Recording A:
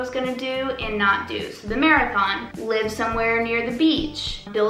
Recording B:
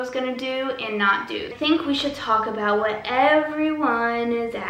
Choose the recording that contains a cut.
B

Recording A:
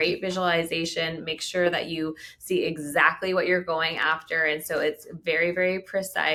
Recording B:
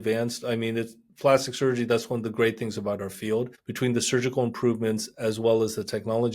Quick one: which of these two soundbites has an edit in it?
B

